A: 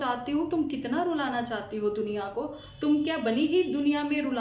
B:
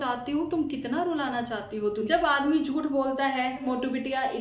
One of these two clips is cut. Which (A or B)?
B